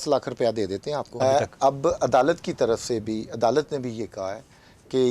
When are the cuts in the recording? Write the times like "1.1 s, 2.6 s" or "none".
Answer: 1.1 s